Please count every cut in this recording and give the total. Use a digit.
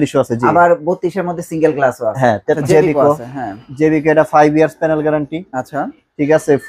1